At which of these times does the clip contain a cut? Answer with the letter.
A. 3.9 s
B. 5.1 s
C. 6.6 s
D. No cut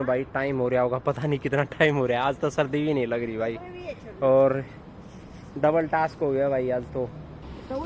D